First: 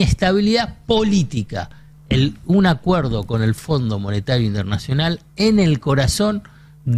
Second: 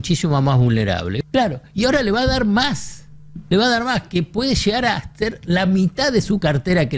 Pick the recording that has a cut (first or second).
second